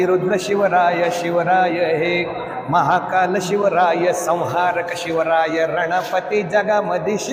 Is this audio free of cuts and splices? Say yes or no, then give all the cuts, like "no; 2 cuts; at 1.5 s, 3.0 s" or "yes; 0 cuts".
yes; 0 cuts